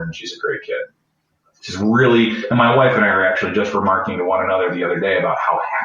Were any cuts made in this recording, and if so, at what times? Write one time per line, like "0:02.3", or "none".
none